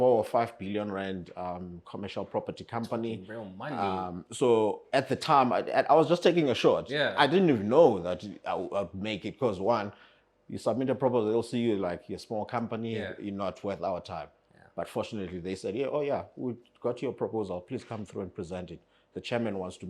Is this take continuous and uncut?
yes; 0 cuts

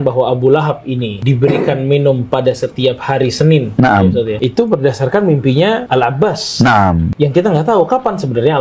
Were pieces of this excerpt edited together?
no; 0 cuts

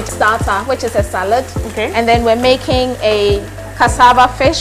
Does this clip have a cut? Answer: no; 0 cuts

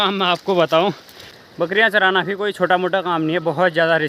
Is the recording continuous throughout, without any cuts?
no; 1 cut; at 1.2 s

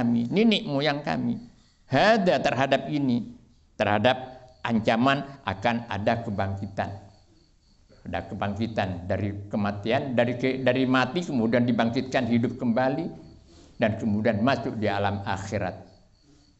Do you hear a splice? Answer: no; 0 cuts

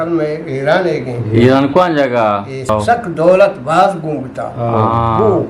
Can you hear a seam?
yes; 1 cut; at 2.7 s

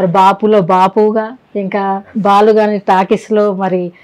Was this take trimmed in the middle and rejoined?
no; 0 cuts

